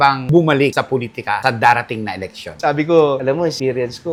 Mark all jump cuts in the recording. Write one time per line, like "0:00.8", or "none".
none